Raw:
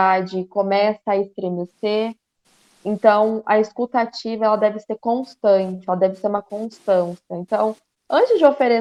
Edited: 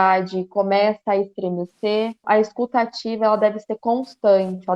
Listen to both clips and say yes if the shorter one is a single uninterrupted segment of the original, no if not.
no